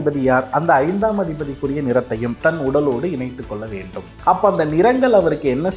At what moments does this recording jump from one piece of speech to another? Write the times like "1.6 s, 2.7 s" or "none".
4.0 s